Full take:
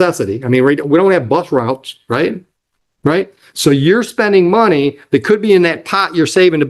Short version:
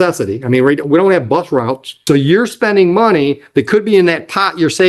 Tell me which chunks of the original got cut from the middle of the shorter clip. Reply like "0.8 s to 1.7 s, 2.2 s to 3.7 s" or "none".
1.9 s to 3.4 s